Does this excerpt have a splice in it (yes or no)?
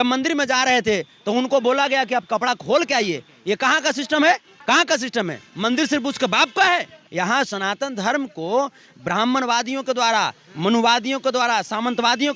yes